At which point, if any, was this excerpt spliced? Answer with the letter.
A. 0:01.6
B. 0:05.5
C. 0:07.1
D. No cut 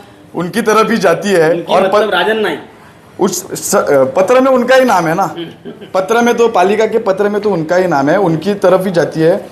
D